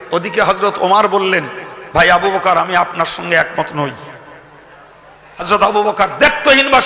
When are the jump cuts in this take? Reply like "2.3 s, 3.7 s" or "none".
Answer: 5.5 s